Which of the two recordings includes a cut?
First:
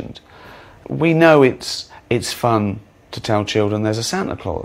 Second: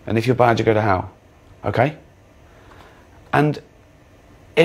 second; 1 cut; at 2.0 s

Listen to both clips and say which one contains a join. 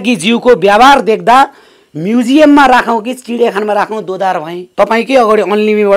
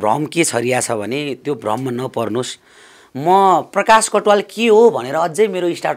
first; 1 cut; at 4.6 s

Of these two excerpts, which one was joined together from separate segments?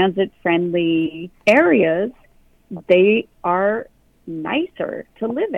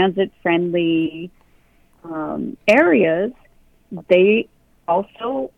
first; 2 cuts; at 1.3 s, 3.3 s

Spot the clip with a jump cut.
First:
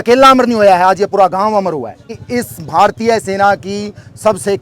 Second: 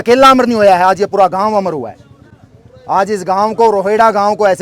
first; 1 cut; at 2.2 s

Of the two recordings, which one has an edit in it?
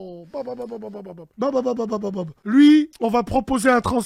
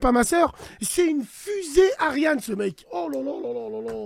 first; 3 cuts; at 1.2 s, 2.3 s, 2.9 s

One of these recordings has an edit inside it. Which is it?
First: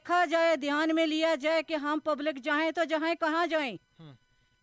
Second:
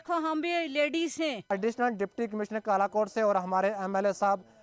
second; 1 cut; at 1.5 s

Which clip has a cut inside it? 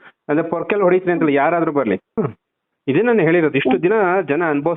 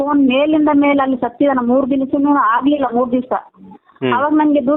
first; 1 cut; at 2.3 s

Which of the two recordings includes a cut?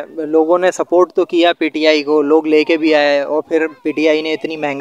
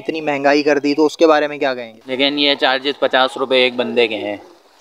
second; 1 cut; at 1.9 s

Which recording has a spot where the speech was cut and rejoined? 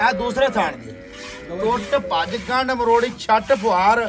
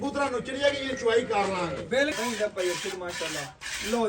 second; 1 cut; at 2.1 s

